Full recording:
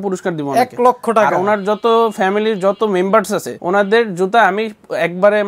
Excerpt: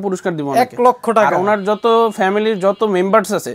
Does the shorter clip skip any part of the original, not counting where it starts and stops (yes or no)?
no